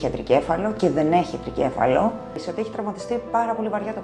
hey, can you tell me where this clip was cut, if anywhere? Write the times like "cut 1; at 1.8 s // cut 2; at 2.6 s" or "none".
cut 1; at 2.4 s